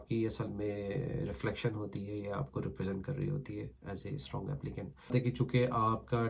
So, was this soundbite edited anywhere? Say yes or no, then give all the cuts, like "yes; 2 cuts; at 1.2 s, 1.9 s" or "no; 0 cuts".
yes; 1 cut; at 5.1 s